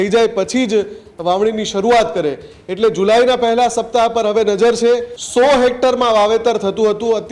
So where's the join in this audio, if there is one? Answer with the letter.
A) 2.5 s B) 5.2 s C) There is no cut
B